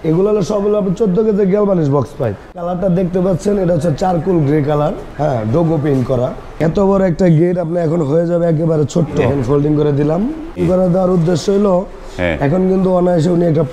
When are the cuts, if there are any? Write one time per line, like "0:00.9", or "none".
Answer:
0:02.6
0:05.1
0:06.6
0:09.3
0:10.6